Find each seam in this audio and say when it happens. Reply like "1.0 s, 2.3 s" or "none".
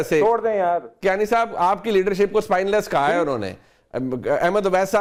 none